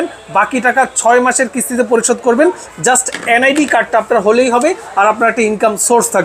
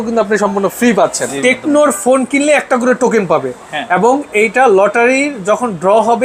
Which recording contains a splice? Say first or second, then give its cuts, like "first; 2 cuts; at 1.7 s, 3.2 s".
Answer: second; 1 cut; at 1.3 s